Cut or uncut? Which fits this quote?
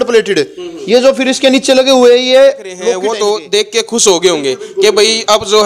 cut